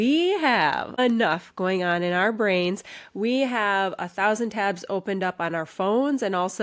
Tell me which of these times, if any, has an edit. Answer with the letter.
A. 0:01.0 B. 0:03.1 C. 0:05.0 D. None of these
A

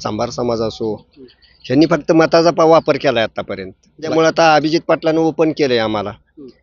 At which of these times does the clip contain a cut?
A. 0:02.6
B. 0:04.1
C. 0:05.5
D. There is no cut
B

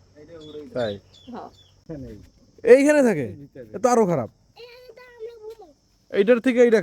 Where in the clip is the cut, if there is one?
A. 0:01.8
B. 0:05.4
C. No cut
A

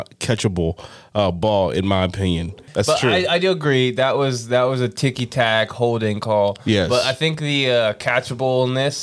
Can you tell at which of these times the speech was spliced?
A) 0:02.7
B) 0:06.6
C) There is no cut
A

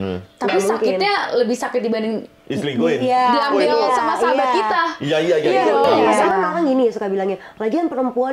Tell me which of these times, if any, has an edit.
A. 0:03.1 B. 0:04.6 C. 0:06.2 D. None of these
C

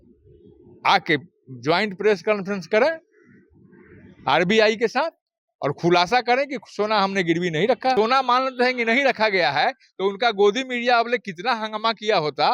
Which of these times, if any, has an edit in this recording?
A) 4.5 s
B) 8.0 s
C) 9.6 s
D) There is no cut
B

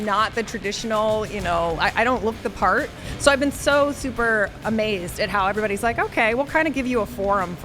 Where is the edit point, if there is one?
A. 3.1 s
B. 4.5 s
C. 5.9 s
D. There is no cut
A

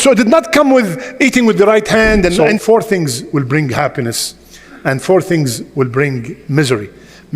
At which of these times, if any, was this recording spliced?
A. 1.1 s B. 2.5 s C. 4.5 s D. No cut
B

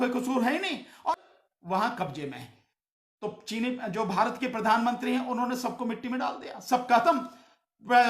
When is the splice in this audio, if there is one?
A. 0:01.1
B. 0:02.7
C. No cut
A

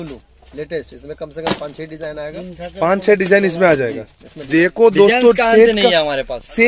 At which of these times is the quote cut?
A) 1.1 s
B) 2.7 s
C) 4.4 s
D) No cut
C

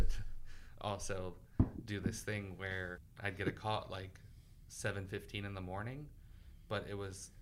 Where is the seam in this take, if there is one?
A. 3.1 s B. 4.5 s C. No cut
A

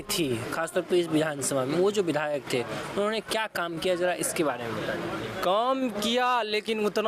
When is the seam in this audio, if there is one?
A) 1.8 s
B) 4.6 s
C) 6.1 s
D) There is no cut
D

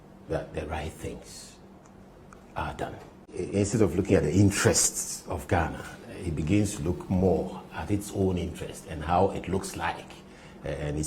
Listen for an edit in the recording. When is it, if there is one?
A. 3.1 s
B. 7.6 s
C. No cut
A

